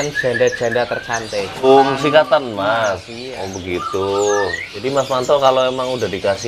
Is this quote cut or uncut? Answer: cut